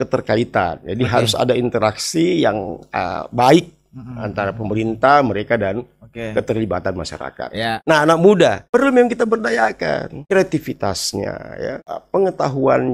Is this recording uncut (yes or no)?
no